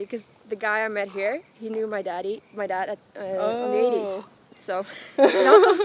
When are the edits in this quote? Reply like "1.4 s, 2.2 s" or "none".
none